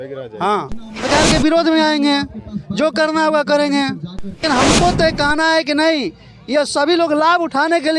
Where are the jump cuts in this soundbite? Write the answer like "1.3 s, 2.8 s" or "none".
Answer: 1.1 s, 4.4 s